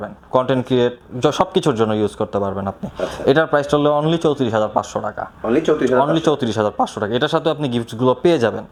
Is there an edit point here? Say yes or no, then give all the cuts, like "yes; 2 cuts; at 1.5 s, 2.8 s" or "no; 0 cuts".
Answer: no; 0 cuts